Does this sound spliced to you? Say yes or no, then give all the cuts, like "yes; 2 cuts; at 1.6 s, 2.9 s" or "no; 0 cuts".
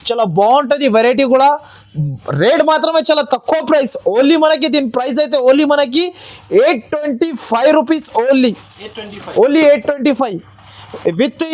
no; 0 cuts